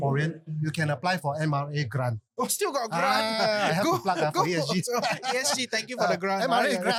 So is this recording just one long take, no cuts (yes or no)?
yes